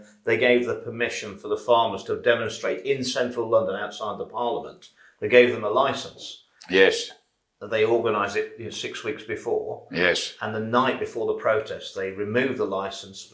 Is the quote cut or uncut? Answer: uncut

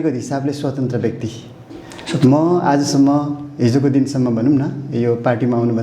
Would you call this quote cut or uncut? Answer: uncut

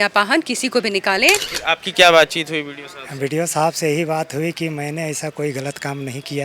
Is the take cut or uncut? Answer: cut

